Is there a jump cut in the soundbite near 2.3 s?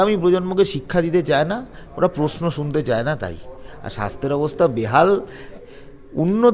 no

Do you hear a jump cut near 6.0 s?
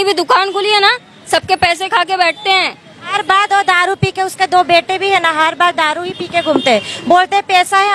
no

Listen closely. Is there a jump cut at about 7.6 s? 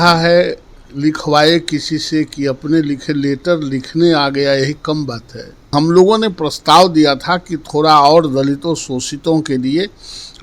no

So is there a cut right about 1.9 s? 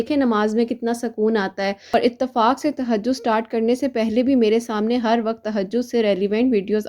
yes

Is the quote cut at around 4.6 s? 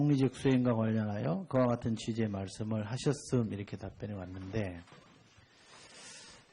no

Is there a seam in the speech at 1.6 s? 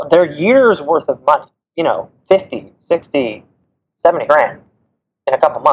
yes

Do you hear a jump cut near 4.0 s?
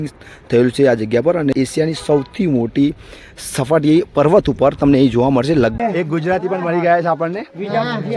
no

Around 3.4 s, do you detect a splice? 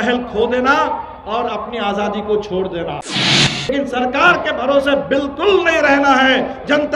yes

